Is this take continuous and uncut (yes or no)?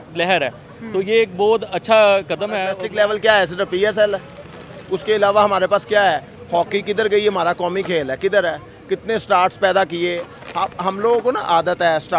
no